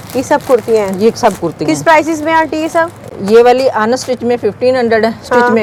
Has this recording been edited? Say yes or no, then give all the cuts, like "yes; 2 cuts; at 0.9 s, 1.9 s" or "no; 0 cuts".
no; 0 cuts